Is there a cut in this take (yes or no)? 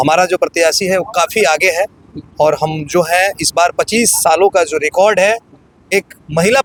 no